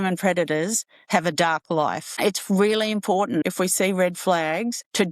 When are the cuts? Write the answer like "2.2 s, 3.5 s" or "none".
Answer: 2.1 s, 3.4 s